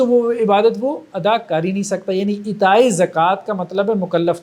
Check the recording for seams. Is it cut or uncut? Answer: uncut